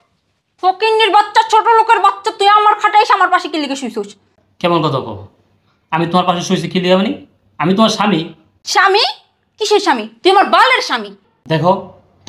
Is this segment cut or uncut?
cut